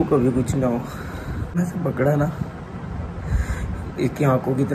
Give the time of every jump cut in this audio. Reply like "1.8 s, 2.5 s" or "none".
1.6 s